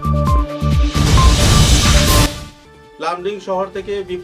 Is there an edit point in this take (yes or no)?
no